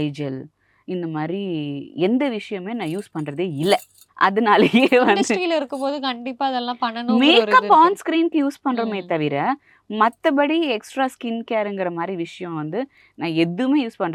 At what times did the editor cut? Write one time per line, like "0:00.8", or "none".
none